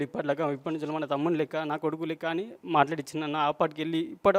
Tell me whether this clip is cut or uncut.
uncut